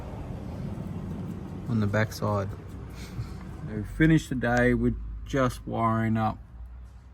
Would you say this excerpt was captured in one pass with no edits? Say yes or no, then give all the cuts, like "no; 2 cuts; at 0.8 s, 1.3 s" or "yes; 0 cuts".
no; 1 cut; at 3.5 s